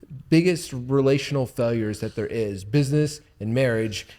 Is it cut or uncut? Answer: uncut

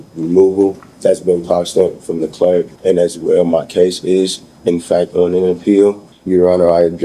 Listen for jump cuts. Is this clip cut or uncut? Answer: cut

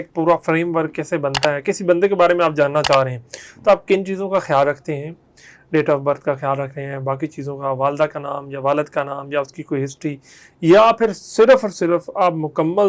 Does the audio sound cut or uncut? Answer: uncut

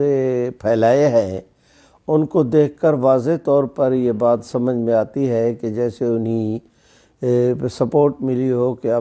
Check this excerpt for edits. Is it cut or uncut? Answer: uncut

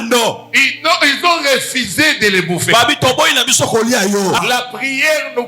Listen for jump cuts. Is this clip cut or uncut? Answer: cut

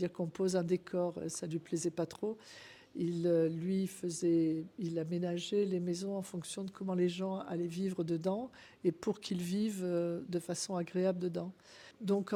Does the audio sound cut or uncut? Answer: uncut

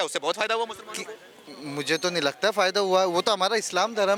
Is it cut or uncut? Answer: uncut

